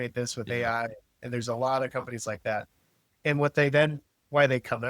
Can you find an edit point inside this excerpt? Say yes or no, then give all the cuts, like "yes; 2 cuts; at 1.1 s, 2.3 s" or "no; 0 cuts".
no; 0 cuts